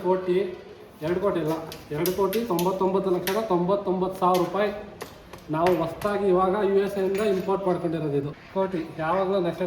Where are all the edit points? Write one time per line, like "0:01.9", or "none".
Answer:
0:08.4

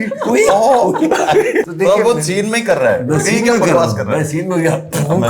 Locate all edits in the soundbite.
0:01.7

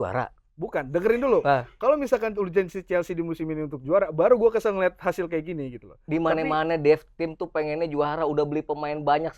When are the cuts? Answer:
none

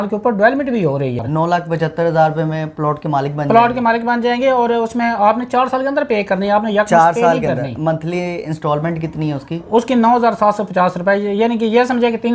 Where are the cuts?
0:01.2

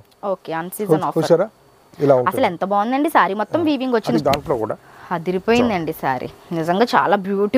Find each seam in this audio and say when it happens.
0:04.1

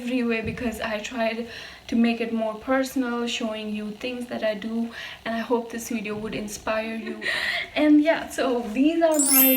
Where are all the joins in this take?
0:07.2

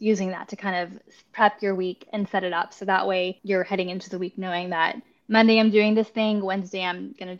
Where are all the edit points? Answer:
0:03.4

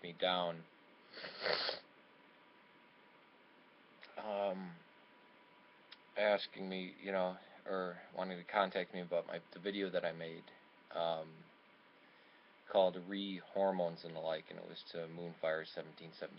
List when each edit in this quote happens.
none

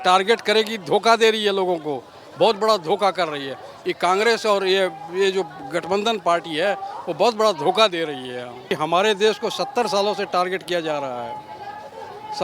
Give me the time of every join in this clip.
0:08.7

